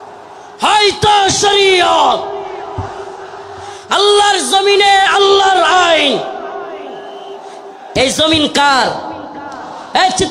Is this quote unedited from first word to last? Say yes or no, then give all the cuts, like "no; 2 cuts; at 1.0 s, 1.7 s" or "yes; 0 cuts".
yes; 0 cuts